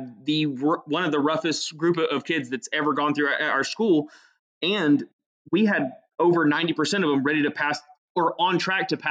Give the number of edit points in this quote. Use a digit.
0